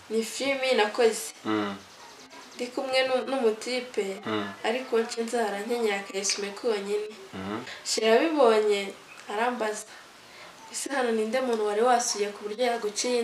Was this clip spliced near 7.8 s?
yes; 1 cut; at 7.8 s

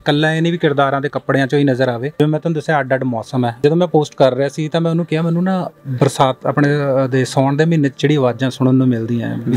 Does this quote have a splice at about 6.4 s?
no; 2 cuts; at 2.2 s, 3.6 s

